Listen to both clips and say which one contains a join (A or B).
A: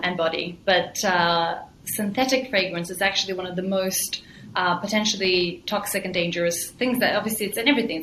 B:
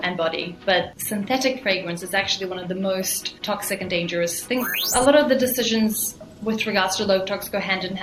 B